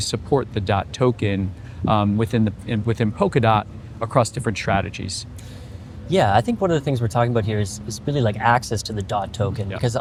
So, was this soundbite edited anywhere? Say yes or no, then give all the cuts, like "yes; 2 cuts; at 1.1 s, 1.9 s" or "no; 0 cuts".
no; 0 cuts